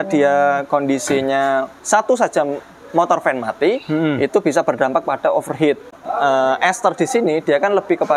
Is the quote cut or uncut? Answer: cut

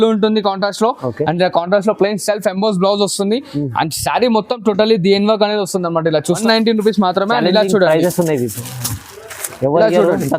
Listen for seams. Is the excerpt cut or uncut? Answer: cut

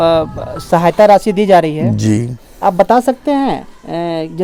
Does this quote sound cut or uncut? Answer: uncut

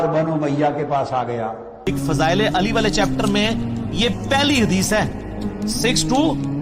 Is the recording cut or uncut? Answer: cut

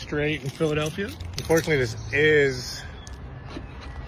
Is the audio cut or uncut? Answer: cut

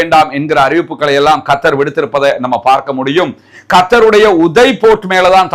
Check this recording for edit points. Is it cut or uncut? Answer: uncut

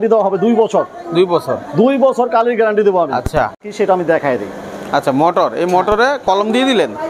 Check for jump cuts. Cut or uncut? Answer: uncut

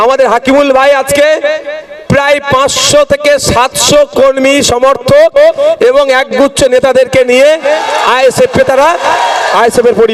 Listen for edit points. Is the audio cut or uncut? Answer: uncut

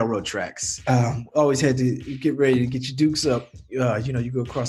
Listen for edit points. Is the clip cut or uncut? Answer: uncut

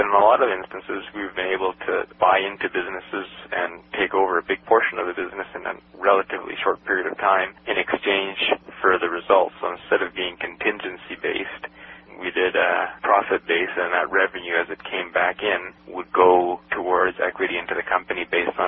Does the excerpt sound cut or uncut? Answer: uncut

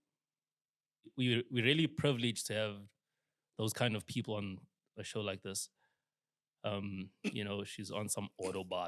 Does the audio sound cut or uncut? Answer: cut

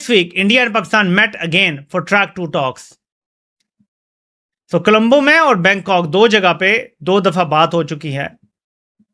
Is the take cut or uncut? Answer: uncut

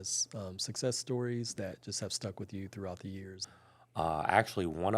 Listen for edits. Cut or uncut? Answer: cut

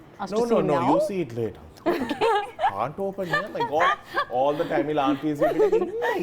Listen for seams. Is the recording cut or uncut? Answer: uncut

